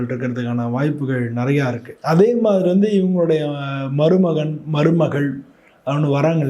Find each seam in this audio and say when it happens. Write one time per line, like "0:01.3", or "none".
0:01.9